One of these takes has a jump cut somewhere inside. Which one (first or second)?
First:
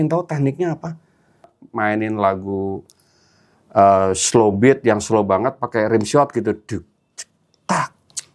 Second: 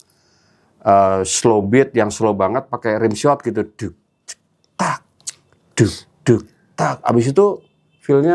first